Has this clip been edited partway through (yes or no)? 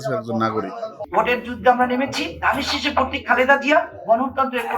yes